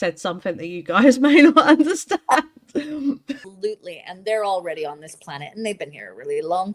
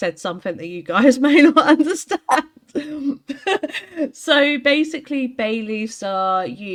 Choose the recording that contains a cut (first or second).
first